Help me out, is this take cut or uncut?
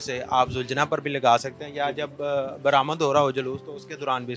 uncut